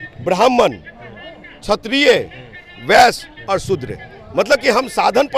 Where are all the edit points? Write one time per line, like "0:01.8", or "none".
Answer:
none